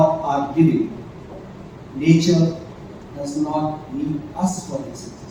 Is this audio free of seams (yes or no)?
yes